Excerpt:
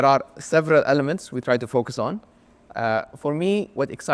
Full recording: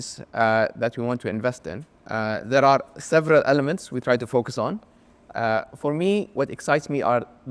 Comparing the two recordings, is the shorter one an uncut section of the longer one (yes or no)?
yes